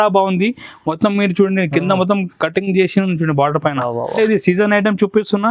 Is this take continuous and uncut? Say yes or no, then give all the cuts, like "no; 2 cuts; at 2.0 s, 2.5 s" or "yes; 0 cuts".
no; 1 cut; at 4.1 s